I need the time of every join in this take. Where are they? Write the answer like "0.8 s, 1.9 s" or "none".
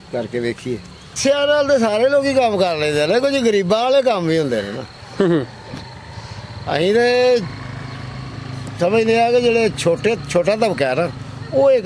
1.2 s

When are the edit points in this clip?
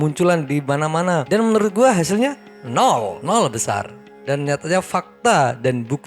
none

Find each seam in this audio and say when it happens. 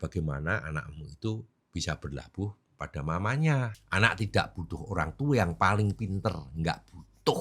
3.7 s

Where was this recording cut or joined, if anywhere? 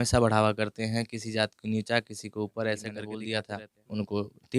3.1 s

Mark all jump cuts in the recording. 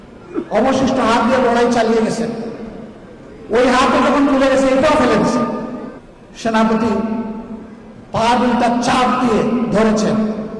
none

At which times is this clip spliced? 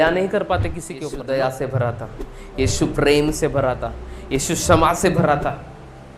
1.2 s

